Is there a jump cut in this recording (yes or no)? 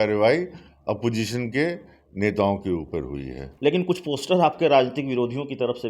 yes